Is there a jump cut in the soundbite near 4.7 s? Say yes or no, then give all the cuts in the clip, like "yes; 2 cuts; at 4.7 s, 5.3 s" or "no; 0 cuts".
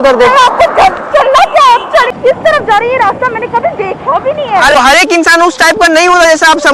yes; 2 cuts; at 2.1 s, 4.7 s